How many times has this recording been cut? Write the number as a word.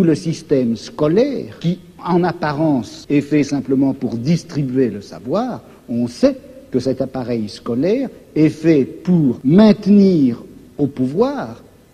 three